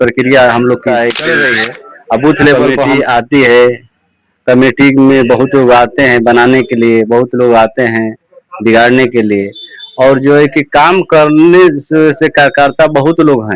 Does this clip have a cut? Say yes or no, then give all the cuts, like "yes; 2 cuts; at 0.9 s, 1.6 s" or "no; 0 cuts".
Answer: yes; 1 cut; at 2.7 s